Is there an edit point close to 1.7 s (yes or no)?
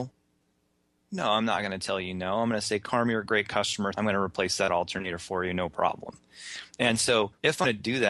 no